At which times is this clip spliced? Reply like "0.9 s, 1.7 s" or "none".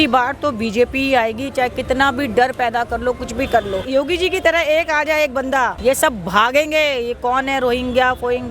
3.8 s, 5.8 s